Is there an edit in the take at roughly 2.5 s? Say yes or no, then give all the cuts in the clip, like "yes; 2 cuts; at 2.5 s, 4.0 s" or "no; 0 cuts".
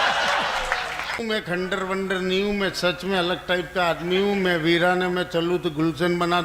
no; 1 cut; at 1.2 s